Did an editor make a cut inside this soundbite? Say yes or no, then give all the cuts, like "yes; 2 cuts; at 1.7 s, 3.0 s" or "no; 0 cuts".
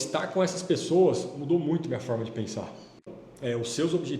yes; 1 cut; at 3.0 s